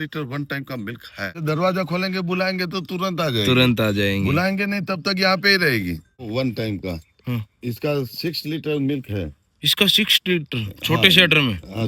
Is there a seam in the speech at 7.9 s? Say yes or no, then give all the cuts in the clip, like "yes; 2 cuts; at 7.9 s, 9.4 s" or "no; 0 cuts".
no; 2 cuts; at 1.4 s, 6.3 s